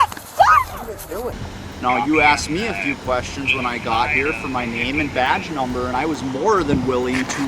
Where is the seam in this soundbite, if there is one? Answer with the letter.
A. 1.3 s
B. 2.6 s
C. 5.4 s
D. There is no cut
A